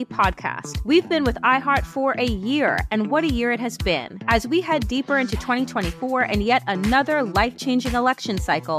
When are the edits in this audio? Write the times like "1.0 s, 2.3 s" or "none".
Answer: none